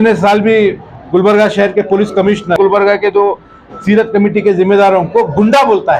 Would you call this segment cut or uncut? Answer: cut